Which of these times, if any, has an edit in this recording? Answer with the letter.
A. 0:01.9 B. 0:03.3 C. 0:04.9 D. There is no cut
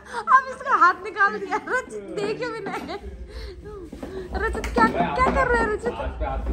D